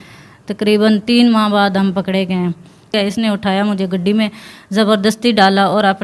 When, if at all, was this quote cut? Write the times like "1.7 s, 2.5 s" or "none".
2.9 s